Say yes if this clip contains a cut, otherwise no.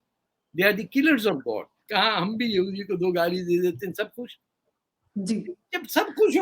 yes